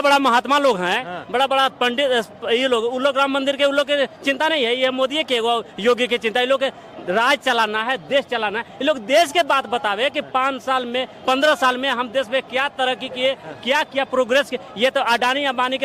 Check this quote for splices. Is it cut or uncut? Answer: uncut